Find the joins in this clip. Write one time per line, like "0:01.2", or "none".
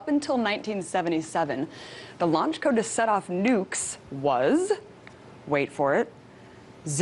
0:02.8